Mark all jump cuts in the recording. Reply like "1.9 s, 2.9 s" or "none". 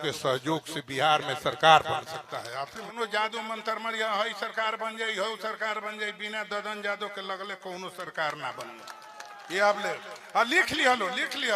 2.9 s